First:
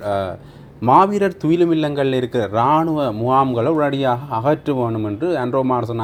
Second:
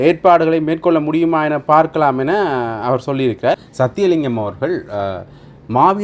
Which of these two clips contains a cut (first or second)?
second